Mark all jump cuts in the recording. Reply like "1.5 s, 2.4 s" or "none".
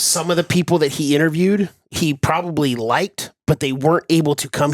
1.8 s